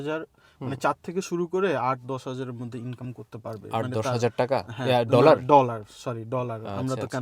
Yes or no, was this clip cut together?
no